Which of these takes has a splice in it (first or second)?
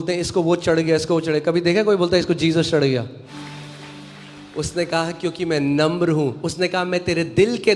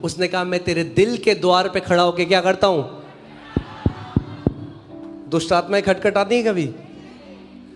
first